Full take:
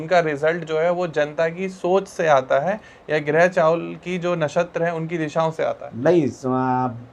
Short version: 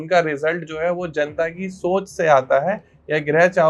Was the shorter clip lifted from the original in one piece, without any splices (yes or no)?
yes